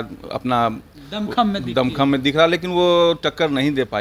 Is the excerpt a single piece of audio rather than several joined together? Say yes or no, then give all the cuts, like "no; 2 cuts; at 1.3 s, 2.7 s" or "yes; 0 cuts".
yes; 0 cuts